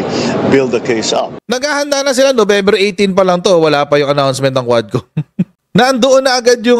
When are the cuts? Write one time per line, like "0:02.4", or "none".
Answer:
0:01.3